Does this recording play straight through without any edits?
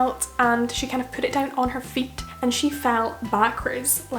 no; 1 cut; at 2.3 s

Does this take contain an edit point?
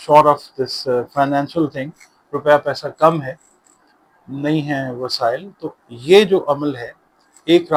no; 0 cuts

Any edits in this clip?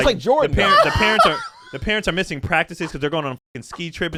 no; 0 cuts

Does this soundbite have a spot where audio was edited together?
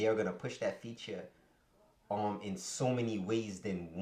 no; 0 cuts

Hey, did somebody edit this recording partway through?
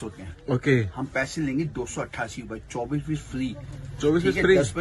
no; 0 cuts

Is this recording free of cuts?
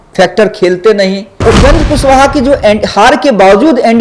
no; 1 cut; at 1.4 s

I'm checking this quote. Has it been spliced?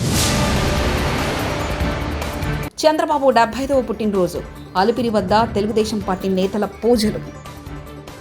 no; 0 cuts

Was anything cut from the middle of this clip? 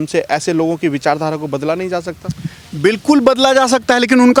no; 0 cuts

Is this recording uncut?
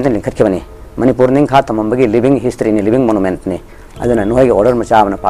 yes; 0 cuts

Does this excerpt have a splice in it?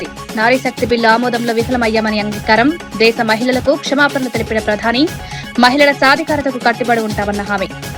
no; 0 cuts

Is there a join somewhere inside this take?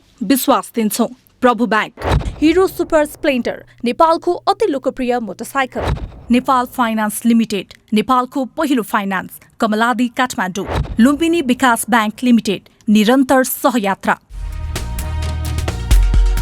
yes; 1 cut; at 14.5 s

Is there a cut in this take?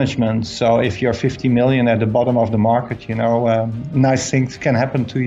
no; 0 cuts

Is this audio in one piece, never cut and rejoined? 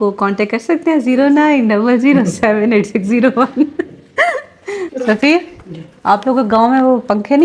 no; 1 cut; at 4.9 s

